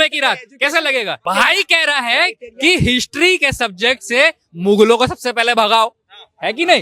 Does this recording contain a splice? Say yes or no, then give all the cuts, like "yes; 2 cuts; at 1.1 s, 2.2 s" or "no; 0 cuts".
yes; 1 cut; at 1.2 s